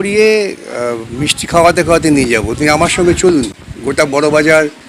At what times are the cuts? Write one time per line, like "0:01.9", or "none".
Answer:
none